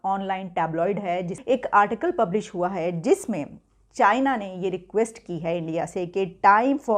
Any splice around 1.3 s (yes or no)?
yes